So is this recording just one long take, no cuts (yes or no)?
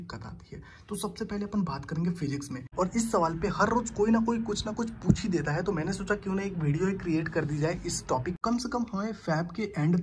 no